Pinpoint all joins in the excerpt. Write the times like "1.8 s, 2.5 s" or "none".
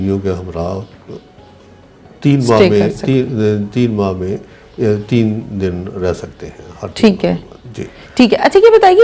none